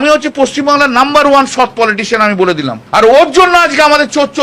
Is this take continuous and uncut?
no; 1 cut; at 3.0 s

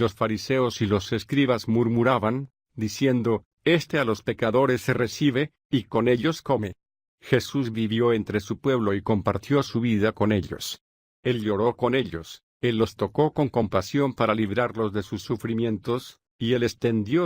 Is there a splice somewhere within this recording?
yes; 1 cut; at 12.1 s

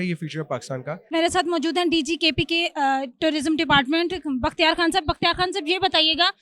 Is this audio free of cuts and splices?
yes; 0 cuts

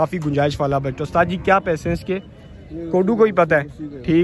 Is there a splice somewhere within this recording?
no; 0 cuts

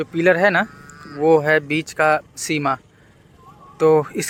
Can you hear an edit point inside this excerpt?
no; 0 cuts

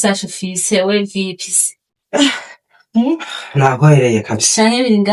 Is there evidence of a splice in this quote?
no; 0 cuts

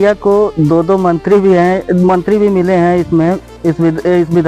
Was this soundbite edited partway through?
no; 0 cuts

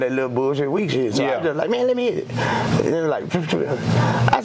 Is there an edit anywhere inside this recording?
no; 0 cuts

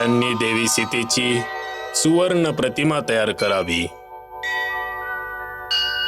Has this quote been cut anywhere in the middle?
no; 0 cuts

